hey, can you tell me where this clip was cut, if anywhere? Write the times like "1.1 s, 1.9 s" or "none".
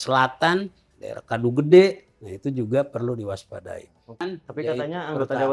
4.3 s